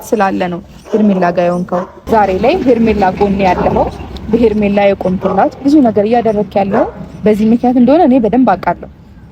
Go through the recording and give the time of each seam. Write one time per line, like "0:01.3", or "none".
0:01.9